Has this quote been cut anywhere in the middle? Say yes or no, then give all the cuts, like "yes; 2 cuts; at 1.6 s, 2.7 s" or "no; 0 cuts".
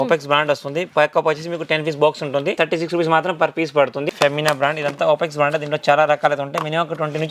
yes; 2 cuts; at 2.6 s, 4.1 s